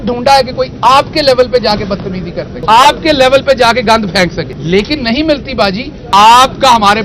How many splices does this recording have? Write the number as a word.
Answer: three